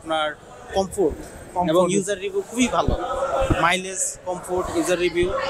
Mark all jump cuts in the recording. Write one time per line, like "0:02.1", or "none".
none